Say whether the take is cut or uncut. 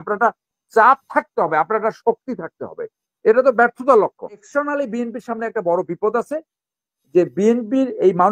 cut